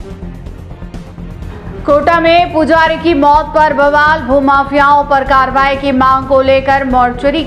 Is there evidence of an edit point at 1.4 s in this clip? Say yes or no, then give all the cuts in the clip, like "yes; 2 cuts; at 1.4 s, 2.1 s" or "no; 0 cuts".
yes; 1 cut; at 1.4 s